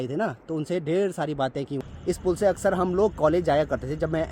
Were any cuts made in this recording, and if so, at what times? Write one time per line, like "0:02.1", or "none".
0:01.8